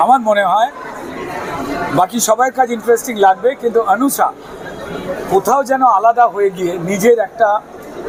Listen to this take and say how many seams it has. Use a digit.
0